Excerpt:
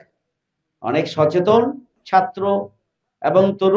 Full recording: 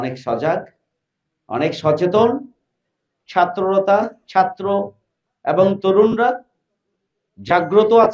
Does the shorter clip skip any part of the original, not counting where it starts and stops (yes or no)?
yes